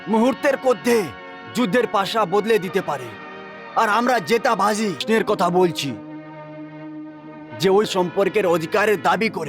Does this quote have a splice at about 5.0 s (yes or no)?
yes